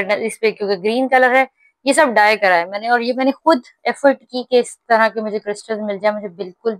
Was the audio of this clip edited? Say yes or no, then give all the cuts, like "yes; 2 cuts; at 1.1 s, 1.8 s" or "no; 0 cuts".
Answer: no; 0 cuts